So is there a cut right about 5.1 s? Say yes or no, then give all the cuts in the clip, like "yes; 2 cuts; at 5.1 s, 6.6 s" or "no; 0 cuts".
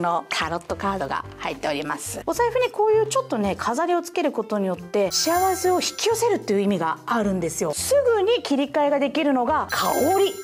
yes; 3 cuts; at 2.2 s, 5.1 s, 7.8 s